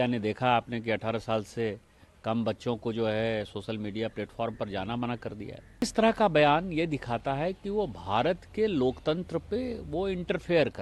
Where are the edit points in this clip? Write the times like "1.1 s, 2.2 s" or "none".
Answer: 5.9 s